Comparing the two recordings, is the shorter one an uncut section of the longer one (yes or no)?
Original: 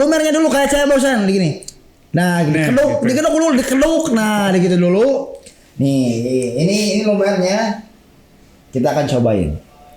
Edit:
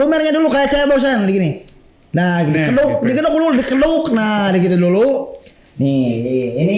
yes